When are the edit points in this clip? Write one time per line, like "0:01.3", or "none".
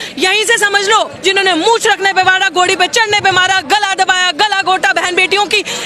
0:01.1